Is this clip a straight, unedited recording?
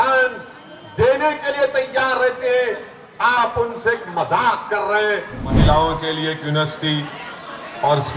no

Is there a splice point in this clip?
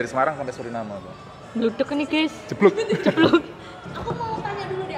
yes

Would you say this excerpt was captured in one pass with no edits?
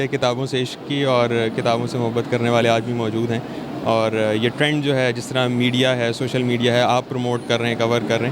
yes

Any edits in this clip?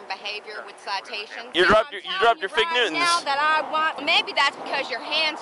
yes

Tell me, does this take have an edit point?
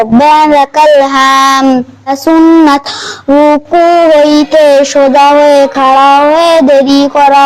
yes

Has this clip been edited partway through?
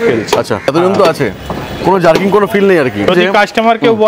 yes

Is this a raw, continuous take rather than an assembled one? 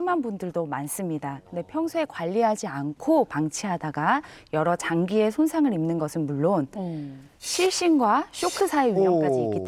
yes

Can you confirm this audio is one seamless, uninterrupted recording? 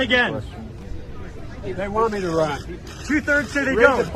yes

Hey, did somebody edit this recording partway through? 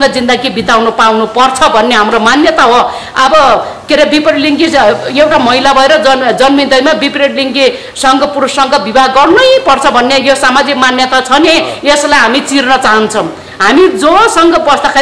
no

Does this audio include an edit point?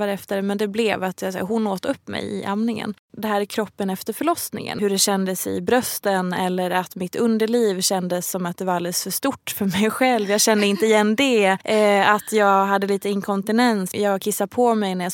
yes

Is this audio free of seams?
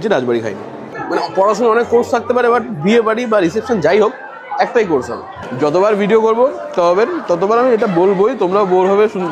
no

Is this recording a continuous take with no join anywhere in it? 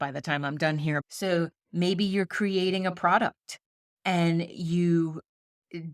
no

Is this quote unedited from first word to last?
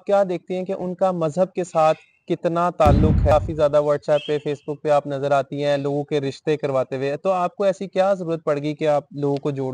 no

